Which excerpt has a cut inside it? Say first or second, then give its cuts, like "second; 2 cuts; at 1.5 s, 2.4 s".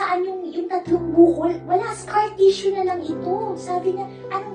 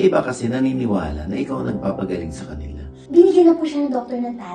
second; 1 cut; at 3.0 s